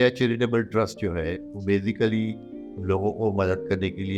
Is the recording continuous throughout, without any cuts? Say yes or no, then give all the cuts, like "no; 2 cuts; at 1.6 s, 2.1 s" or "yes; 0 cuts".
yes; 0 cuts